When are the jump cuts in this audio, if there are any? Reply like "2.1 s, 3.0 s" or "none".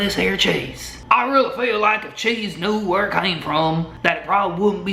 0.9 s

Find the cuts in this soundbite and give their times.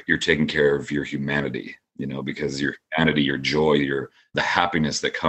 4.3 s

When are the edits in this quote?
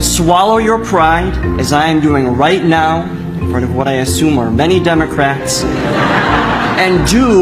none

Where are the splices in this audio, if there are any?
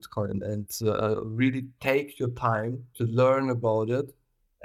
2.8 s

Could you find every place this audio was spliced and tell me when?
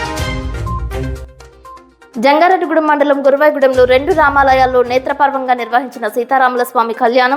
0.9 s

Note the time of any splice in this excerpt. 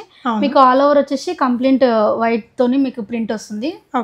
none

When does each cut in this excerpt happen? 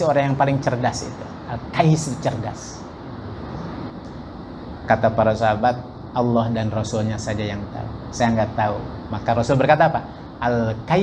3.9 s

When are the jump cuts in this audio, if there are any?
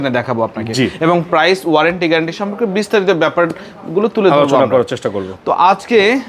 none

